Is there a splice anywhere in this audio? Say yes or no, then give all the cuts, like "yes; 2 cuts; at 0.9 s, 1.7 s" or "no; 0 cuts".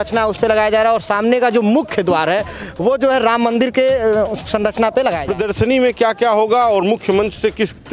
yes; 1 cut; at 5.2 s